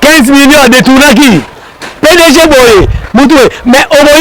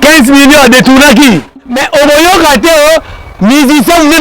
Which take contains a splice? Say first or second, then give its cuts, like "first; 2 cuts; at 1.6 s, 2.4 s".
second; 1 cut; at 1.9 s